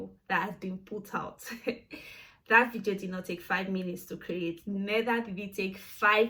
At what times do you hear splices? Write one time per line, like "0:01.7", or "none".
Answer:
none